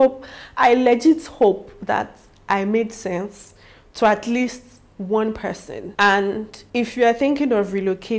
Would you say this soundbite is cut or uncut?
uncut